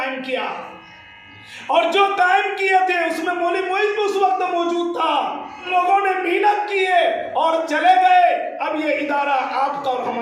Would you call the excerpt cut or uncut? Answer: cut